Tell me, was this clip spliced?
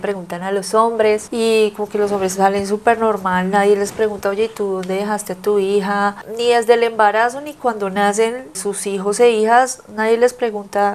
no; 0 cuts

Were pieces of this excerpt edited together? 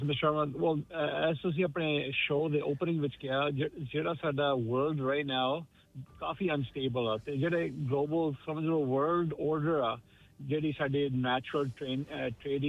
no; 0 cuts

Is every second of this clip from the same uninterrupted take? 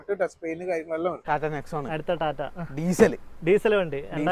no; 1 cut; at 1.2 s

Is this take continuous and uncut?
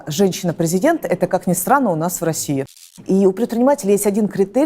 no; 1 cut; at 2.8 s

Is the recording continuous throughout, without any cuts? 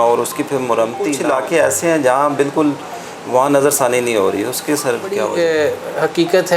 no; 2 cuts; at 1.2 s, 5.3 s

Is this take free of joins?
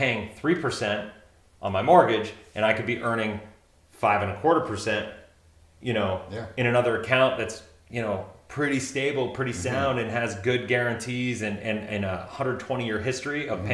yes; 0 cuts

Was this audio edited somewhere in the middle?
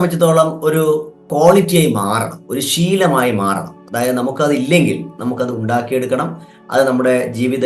yes; 1 cut; at 1.2 s

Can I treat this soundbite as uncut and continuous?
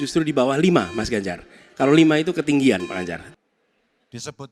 no; 1 cut; at 3.2 s

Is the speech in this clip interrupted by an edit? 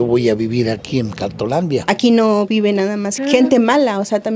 yes; 2 cuts; at 1.8 s, 3.1 s

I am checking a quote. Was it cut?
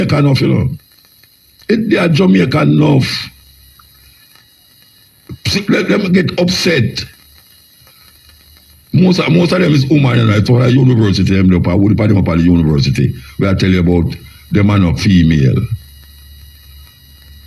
no; 0 cuts

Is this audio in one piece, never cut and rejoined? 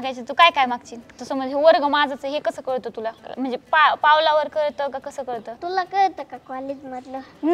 no; 3 cuts; at 1.2 s, 3.2 s, 5.6 s

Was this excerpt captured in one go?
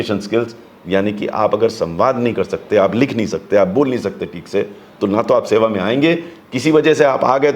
yes; 0 cuts

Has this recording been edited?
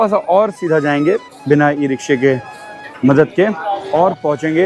no; 0 cuts

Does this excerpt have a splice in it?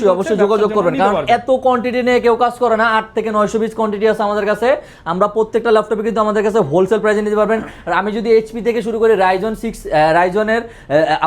no; 0 cuts

